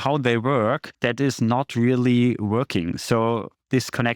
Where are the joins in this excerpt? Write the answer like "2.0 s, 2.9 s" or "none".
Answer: 0.9 s